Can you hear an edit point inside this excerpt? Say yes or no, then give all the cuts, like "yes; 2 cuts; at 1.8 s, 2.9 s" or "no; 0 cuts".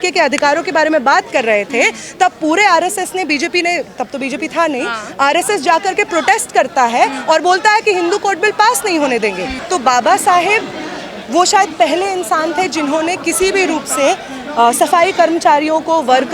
yes; 1 cut; at 9.5 s